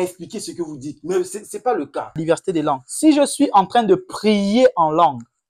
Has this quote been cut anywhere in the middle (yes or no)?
yes